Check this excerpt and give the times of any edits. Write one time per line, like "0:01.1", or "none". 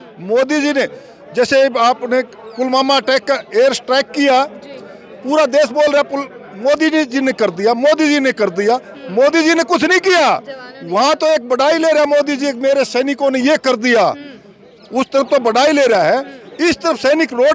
none